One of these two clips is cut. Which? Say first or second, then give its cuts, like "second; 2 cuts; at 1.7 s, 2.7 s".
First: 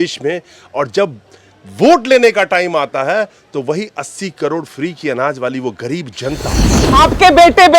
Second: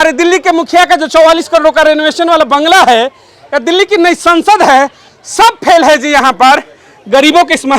first; 1 cut; at 6.7 s